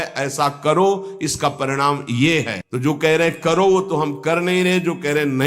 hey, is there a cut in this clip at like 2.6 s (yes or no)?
yes